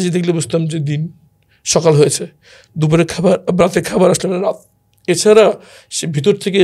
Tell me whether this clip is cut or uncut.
uncut